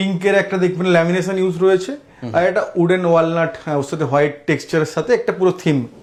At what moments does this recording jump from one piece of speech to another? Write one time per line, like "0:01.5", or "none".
none